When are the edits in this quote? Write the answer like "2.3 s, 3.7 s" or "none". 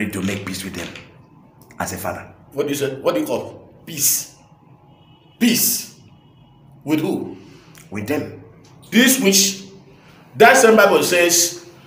none